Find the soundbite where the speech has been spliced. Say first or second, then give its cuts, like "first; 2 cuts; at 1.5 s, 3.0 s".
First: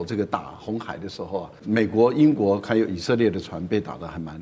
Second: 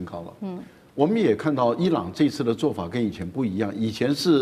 first; 1 cut; at 1.6 s